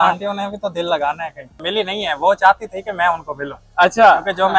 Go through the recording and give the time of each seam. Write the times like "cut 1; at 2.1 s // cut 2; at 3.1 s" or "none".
cut 1; at 1.6 s